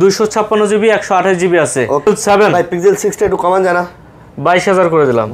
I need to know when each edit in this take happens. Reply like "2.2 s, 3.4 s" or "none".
2.1 s